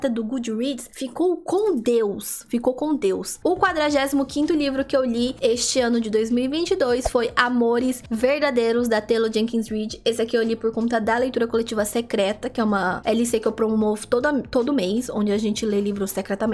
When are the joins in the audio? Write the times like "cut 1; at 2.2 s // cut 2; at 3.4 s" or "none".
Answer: none